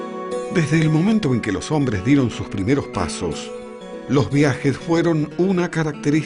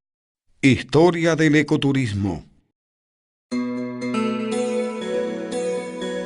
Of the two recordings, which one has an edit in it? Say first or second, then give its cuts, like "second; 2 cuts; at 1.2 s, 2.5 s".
first; 1 cut; at 1.6 s